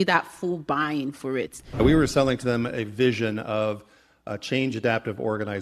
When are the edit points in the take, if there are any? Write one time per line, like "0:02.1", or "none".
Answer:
0:01.8

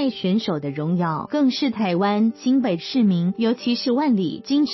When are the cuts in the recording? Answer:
none

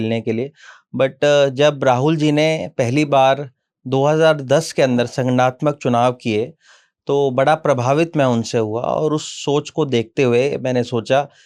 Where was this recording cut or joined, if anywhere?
none

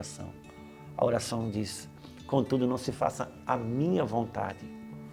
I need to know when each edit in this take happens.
none

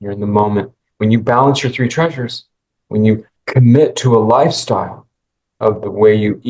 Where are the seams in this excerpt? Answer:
0:03.3

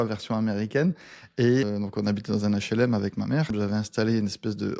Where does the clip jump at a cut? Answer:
0:01.6
0:03.5

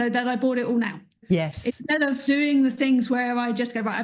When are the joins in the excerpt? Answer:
0:01.2
0:02.2

